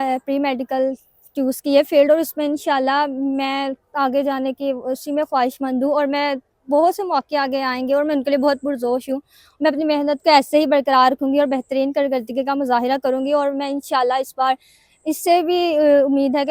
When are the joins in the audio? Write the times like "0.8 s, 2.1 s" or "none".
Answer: none